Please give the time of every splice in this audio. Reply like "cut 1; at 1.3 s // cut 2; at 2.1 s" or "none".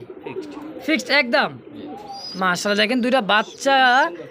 none